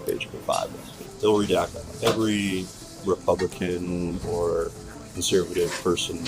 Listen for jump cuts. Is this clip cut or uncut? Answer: cut